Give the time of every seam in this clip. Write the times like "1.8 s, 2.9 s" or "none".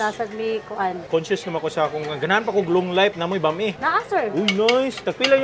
1.0 s, 3.8 s